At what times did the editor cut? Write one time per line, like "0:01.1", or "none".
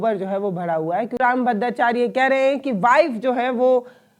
0:01.2